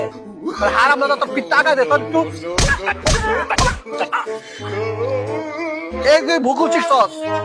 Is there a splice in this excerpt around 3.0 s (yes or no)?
no